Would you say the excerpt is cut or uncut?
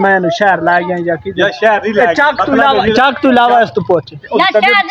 uncut